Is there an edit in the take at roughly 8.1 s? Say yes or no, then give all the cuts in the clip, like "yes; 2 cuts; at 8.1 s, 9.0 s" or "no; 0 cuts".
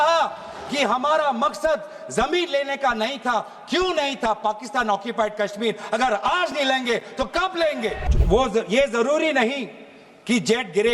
yes; 1 cut; at 8.1 s